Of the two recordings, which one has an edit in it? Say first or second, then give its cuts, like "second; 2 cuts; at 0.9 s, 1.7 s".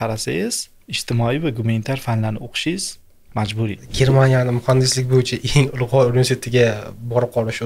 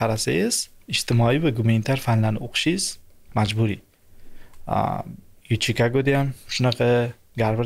first; 1 cut; at 3.8 s